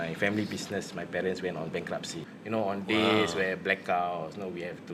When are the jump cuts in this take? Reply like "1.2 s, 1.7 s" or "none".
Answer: 2.2 s